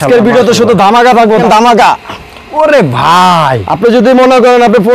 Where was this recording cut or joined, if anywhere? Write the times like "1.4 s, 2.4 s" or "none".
1.4 s